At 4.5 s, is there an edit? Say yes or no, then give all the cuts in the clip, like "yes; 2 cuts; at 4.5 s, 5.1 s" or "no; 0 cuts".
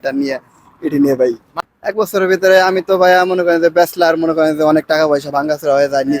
no; 1 cut; at 1.5 s